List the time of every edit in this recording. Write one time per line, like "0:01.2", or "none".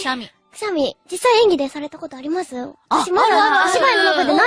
0:02.6